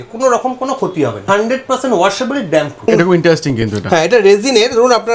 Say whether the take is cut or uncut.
cut